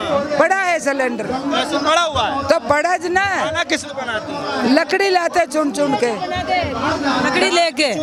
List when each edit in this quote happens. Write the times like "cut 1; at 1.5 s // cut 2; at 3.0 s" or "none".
none